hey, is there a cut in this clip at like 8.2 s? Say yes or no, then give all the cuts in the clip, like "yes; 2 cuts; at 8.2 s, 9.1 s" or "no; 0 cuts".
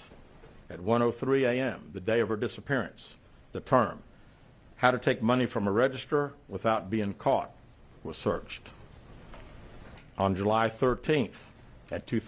yes; 1 cut; at 8.2 s